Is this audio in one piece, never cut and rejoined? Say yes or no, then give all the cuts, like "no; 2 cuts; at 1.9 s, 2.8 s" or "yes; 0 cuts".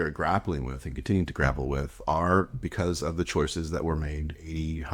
yes; 0 cuts